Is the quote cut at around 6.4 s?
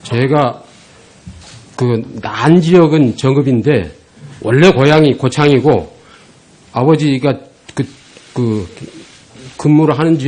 no; 1 cut; at 2.4 s

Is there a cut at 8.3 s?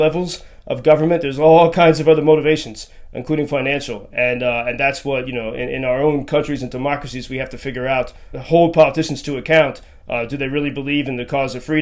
yes; 1 cut; at 8.3 s

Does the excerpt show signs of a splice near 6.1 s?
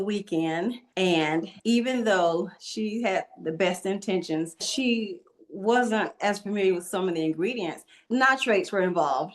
no; 4 cuts; at 1.2 s, 2.6 s, 4.7 s, 7.9 s

